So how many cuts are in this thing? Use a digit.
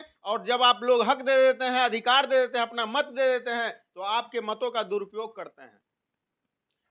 0